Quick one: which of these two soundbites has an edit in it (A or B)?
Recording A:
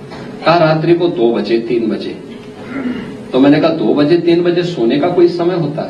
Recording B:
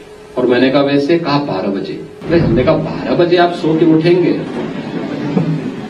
B